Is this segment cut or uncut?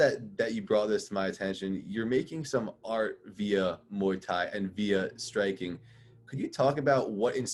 uncut